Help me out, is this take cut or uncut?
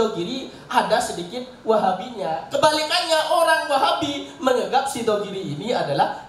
uncut